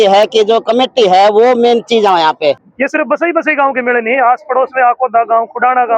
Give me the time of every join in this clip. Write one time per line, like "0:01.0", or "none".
0:02.7